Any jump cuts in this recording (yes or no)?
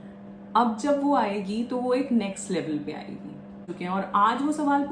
yes